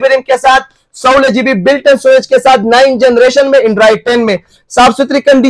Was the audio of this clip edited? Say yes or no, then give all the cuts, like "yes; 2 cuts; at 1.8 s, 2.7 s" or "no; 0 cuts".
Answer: no; 0 cuts